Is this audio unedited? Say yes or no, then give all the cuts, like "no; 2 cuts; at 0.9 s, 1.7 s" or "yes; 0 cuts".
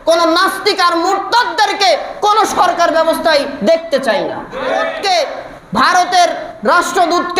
no; 1 cut; at 4.9 s